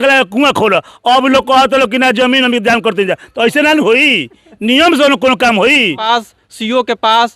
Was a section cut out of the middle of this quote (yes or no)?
yes